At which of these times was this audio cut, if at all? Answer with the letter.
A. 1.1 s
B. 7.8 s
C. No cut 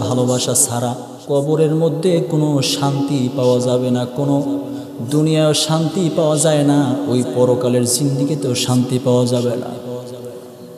A